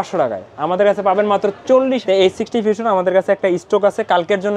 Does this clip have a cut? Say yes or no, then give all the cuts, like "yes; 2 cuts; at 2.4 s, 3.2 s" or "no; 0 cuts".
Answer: yes; 1 cut; at 2.0 s